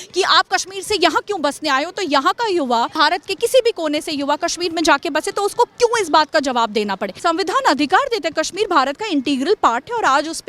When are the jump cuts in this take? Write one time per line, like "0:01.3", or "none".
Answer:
0:02.9
0:07.1

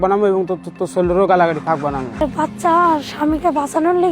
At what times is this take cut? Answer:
0:02.2

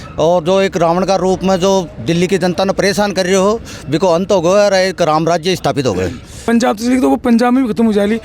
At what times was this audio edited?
0:06.3

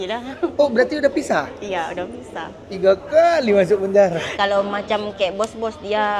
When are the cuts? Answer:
0:04.3

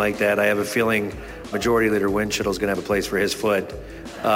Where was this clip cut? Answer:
0:01.5

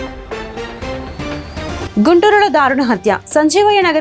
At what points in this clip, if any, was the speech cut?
0:01.7

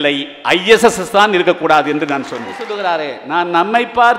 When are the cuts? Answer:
0:02.7

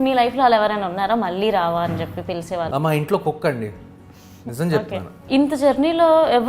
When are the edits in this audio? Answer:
0:02.7
0:05.1

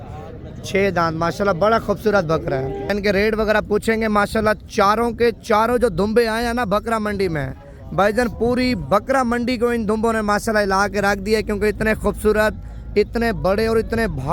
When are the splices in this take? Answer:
0:02.9

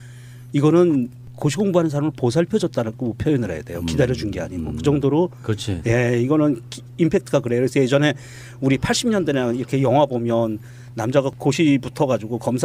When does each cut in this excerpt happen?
0:10.4

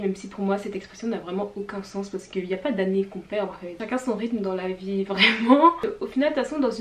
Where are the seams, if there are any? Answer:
0:03.7
0:05.8

